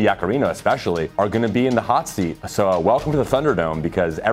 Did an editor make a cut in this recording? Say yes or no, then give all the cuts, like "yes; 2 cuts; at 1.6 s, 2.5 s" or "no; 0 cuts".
yes; 2 cuts; at 1.1 s, 2.4 s